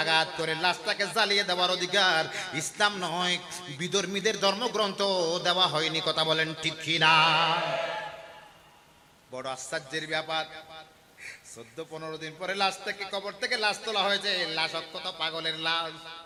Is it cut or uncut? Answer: uncut